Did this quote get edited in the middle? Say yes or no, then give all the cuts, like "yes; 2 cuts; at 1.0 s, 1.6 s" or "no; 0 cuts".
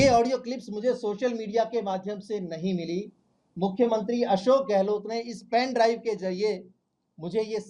no; 0 cuts